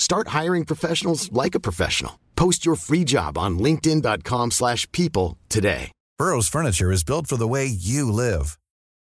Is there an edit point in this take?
yes; 1 cut; at 6.0 s

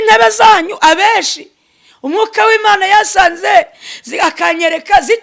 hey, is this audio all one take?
yes; 0 cuts

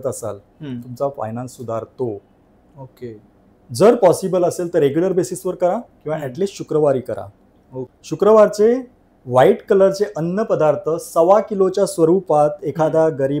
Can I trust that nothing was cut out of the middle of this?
yes; 0 cuts

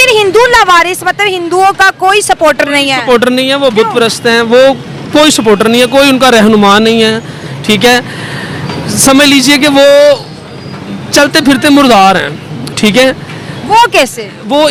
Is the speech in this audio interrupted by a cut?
no; 0 cuts

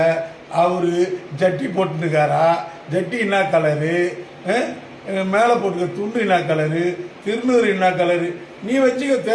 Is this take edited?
no; 0 cuts

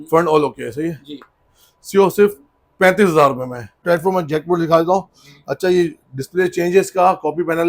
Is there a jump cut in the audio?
yes; 1 cut; at 3.7 s

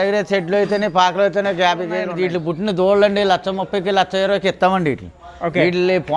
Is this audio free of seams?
no; 1 cut; at 2.1 s

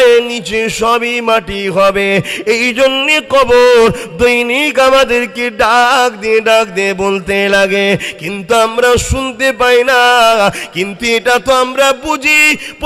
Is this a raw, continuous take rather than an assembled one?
yes; 0 cuts

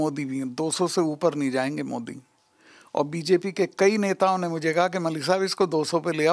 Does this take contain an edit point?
no; 0 cuts

